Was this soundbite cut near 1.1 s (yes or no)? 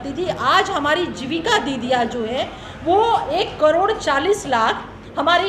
no